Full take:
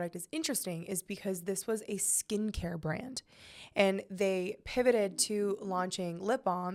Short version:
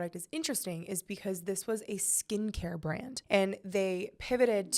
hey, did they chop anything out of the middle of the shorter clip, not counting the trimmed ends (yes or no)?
yes